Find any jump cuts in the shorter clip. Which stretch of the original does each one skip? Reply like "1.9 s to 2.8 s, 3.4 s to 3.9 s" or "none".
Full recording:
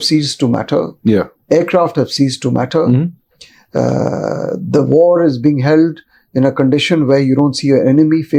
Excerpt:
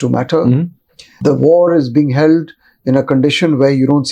3.5 s to 4.6 s

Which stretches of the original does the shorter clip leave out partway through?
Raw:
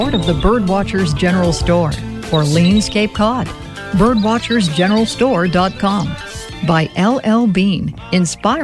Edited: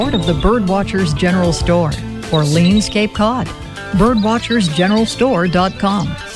none

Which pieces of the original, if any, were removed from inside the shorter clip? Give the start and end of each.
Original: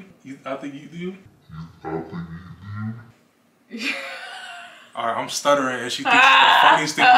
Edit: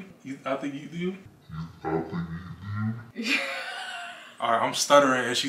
3.1 s to 3.6 s

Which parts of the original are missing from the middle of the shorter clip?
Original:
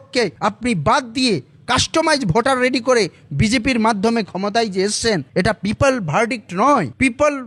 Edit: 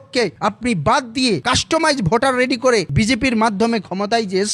1.4 s to 1.7 s, 3.1 s to 3.3 s

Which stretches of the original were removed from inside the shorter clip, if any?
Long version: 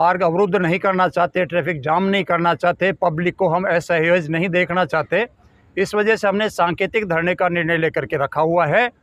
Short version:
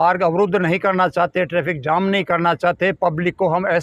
none

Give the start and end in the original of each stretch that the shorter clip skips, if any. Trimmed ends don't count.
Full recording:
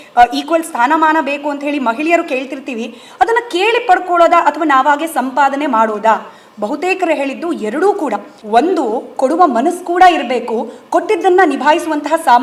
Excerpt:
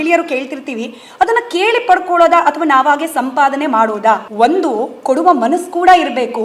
6.3 s to 8.4 s

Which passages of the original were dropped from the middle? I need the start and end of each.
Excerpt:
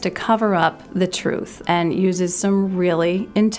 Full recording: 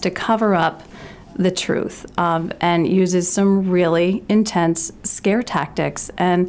1.4 s to 2.3 s

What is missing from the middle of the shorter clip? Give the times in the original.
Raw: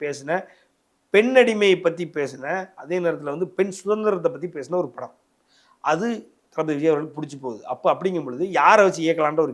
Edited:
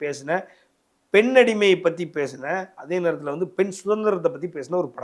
none

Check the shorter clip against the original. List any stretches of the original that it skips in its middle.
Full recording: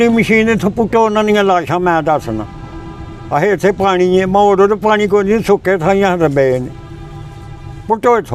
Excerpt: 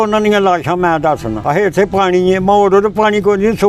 2.4 s to 3.2 s

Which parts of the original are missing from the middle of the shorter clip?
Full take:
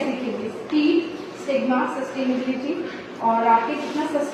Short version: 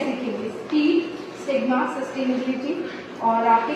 none

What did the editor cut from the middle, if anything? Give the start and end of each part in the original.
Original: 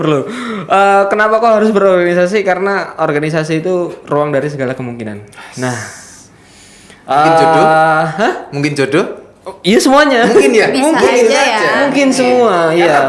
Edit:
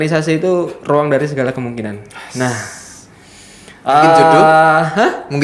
none

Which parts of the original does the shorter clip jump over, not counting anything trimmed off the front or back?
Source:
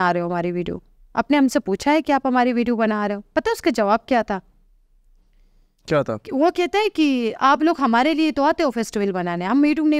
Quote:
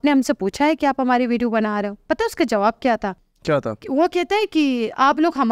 4.5 s to 5.7 s

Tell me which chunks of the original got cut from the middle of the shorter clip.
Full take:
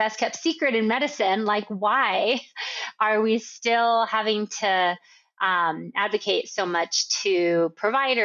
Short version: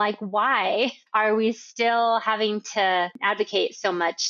2.5 s to 2.9 s, 5.0 s to 5.9 s

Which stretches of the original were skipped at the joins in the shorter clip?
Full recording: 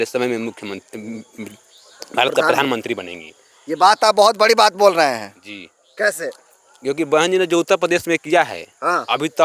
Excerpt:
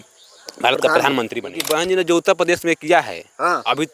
3.1 s to 7.0 s

